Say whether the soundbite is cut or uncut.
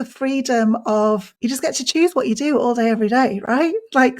cut